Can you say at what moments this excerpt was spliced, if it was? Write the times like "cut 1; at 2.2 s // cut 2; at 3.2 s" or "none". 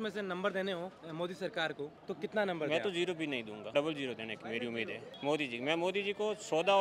cut 1; at 1.0 s // cut 2; at 2.0 s // cut 3; at 3.6 s // cut 4; at 5.1 s